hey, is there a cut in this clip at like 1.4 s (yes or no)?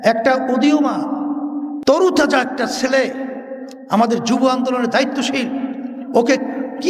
no